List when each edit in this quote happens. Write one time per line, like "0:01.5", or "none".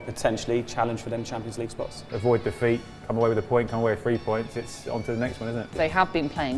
0:02.1
0:05.7